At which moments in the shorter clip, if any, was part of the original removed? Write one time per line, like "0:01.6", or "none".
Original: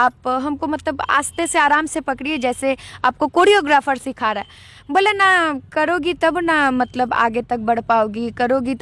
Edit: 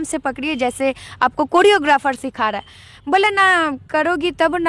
none